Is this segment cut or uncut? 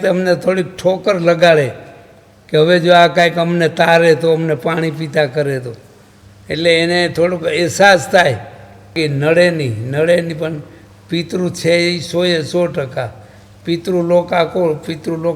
cut